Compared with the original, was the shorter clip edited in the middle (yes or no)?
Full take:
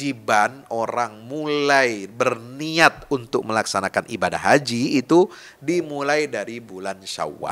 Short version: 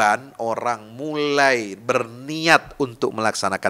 no